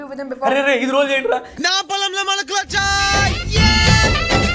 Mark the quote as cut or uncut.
uncut